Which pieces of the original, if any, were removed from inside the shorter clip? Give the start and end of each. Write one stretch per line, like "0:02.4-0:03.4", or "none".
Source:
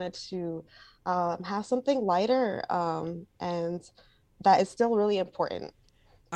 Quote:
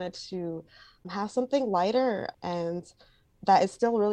0:01.0-0:01.4
0:02.6-0:03.3

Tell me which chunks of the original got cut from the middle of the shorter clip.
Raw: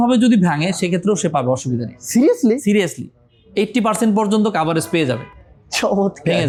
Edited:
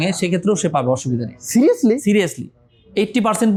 none

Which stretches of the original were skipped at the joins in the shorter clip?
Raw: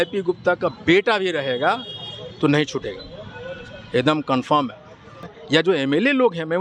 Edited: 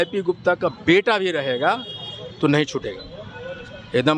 none

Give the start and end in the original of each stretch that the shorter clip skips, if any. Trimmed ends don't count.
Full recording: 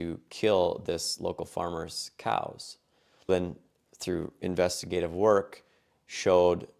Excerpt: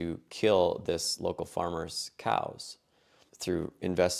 0:03.1-0:03.7

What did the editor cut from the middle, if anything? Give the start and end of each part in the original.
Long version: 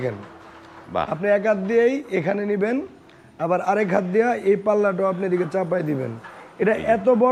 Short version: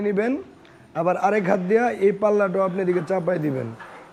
none

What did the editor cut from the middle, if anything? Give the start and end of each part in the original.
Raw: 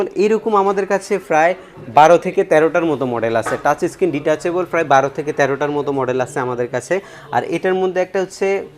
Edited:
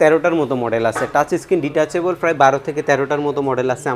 none

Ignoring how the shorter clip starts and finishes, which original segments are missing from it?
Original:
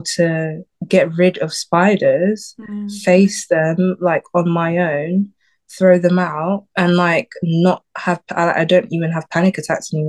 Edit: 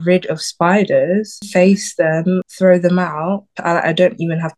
0:02.5-0:02.9
0:04.0-0:05.6
0:06.7-0:08.2

